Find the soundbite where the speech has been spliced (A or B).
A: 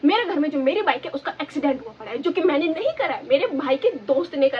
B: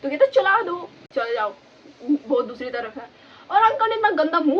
B